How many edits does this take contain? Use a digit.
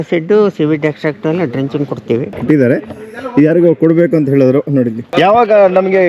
2